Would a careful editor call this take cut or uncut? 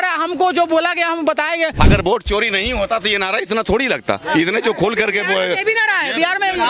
cut